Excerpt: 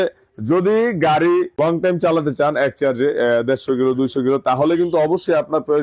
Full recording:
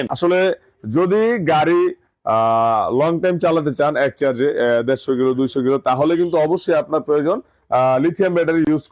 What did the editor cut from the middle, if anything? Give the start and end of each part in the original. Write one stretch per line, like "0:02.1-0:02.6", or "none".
0:02.0-0:03.0